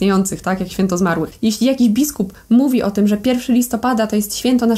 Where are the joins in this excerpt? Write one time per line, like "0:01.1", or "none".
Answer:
0:01.3